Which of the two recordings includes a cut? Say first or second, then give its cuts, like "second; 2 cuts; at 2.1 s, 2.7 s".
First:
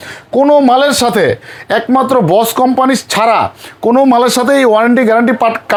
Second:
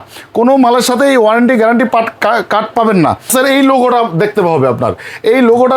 second; 1 cut; at 3.3 s